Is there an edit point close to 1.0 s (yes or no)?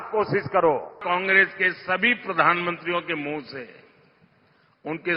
yes